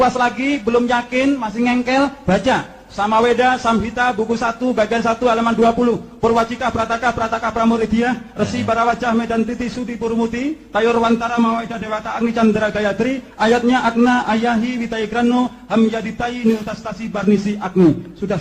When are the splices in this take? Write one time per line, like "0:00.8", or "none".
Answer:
none